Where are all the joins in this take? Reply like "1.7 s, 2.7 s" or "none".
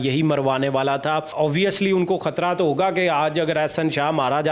1.3 s